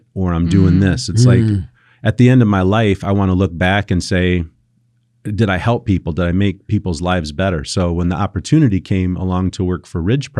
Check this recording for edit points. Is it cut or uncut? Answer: uncut